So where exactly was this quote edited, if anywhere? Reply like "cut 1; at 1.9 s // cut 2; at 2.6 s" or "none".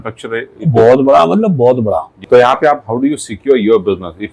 cut 1; at 2.1 s